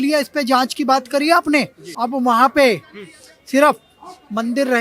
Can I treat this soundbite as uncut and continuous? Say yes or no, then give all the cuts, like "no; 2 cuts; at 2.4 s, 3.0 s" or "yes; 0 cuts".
no; 1 cut; at 1.8 s